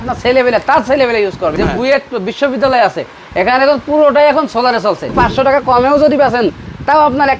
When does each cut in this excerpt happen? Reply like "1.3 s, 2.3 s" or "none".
1.5 s, 5.1 s